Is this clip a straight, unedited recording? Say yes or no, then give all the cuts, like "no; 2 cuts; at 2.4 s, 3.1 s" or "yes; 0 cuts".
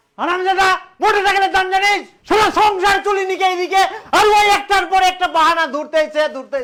yes; 0 cuts